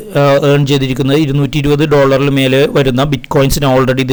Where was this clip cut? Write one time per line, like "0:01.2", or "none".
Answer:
none